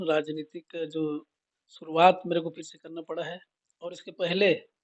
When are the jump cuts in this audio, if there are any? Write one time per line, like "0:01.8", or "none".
none